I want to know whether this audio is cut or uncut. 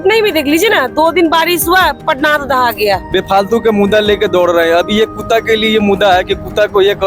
cut